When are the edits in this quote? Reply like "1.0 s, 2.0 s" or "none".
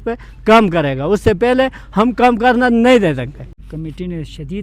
3.6 s